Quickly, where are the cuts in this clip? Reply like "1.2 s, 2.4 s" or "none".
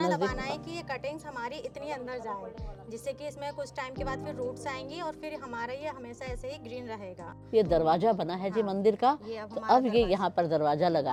none